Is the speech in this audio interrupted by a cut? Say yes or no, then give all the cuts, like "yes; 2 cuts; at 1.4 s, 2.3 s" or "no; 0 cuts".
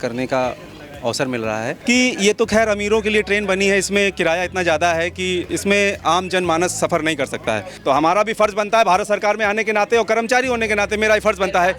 yes; 2 cuts; at 1.7 s, 7.7 s